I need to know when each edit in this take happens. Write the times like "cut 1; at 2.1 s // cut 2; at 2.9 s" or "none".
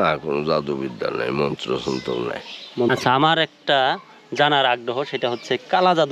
cut 1; at 2.9 s